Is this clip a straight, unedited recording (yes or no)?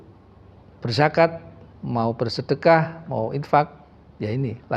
yes